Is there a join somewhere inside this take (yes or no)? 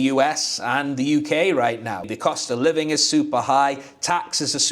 yes